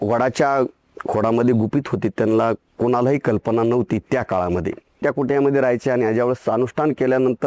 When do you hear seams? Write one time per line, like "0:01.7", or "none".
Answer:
0:05.0